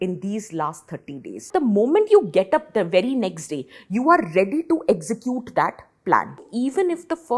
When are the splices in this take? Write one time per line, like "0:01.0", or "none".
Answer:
0:01.5
0:06.5